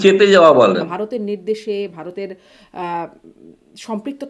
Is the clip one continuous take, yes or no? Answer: no